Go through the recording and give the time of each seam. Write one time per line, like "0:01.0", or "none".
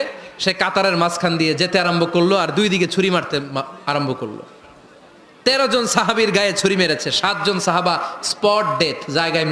none